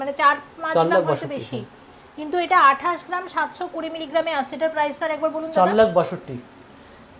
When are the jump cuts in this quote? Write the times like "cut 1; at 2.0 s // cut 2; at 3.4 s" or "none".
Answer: none